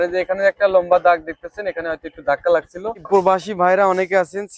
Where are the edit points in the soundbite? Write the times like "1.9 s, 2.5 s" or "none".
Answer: 3.0 s

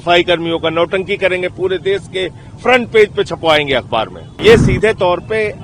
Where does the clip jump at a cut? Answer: 4.4 s

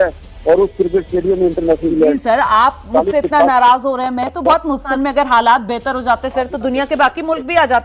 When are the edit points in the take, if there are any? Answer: 1.9 s, 4.9 s

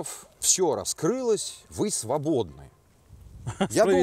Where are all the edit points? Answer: none

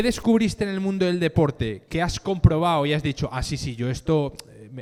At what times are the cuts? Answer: none

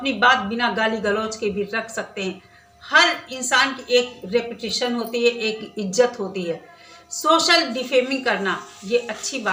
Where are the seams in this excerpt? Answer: none

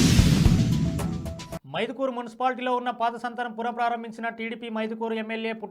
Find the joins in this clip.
1.5 s

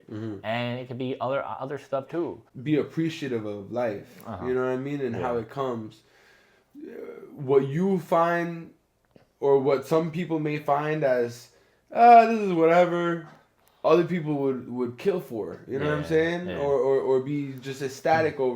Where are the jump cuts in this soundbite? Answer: 2.5 s

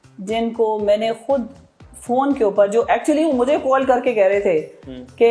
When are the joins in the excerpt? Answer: none

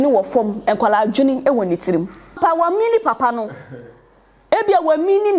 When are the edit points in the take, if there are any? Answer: 2.3 s

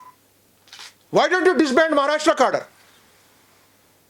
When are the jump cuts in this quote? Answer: 1.0 s

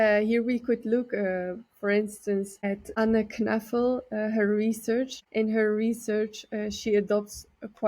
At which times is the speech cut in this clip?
2.9 s, 5.2 s

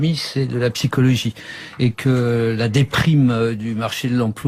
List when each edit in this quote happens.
none

